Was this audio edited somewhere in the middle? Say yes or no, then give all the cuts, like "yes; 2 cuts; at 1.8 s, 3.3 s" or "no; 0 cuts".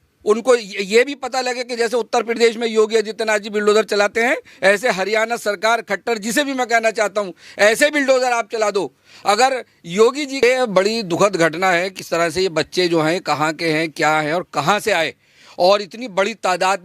yes; 1 cut; at 10.4 s